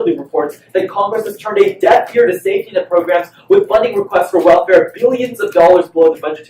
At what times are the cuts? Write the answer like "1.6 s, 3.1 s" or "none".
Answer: 3.0 s